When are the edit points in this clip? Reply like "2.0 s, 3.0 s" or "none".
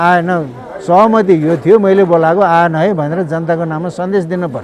none